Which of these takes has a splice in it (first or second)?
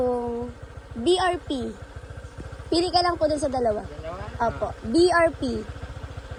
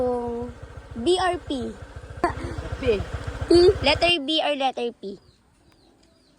second